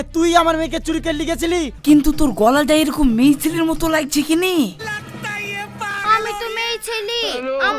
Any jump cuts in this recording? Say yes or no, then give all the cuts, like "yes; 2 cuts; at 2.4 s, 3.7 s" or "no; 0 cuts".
yes; 1 cut; at 1.7 s